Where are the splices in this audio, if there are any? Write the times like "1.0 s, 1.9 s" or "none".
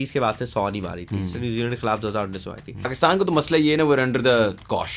2.9 s